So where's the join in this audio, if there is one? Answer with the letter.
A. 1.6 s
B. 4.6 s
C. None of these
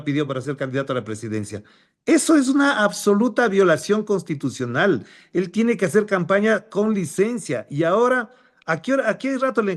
C